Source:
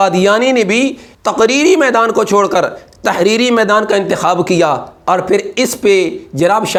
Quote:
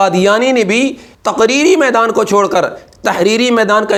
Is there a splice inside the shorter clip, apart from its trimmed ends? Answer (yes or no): no